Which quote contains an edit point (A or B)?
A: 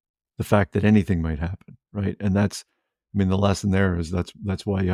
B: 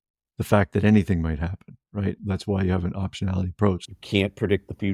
B